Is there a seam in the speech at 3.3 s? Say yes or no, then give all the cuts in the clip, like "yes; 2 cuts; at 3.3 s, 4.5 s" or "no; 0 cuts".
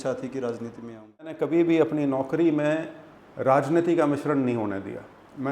no; 1 cut; at 1.4 s